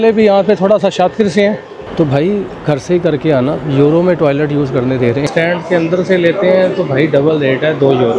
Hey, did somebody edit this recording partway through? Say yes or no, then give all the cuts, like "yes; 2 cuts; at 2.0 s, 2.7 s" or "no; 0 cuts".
yes; 2 cuts; at 1.8 s, 5.2 s